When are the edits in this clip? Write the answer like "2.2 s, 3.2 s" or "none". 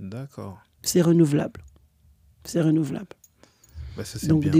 none

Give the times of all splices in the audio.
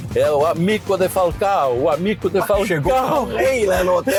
none

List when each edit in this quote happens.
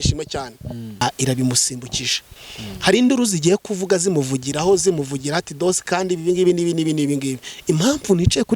1.0 s, 7.5 s

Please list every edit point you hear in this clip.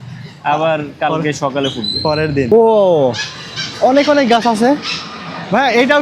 2.5 s

